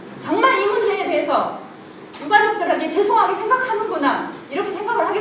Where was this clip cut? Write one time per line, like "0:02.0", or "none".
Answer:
none